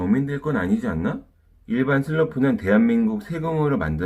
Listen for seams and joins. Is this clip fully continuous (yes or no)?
no